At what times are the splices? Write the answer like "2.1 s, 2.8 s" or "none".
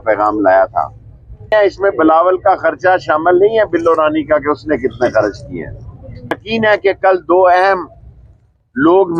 1.5 s, 6.4 s